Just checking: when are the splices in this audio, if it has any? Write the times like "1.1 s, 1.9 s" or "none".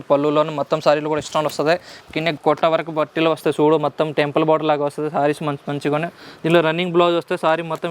none